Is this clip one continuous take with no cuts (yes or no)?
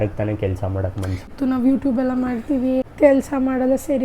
no